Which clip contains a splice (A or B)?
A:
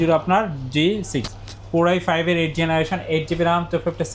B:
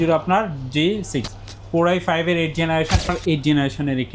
B